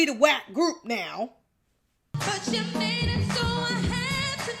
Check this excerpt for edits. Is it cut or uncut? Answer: cut